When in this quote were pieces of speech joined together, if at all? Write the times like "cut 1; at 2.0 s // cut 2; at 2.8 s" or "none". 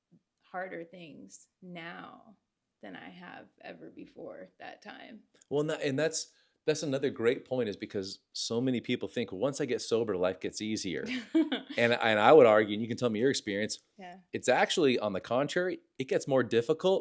none